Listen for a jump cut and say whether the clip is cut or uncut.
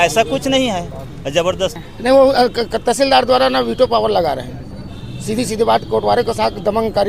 cut